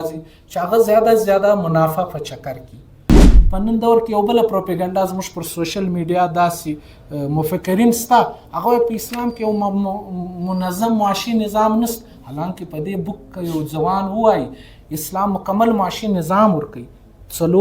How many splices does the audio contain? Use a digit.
1